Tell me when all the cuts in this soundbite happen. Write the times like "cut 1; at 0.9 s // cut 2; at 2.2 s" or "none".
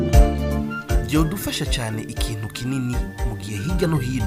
none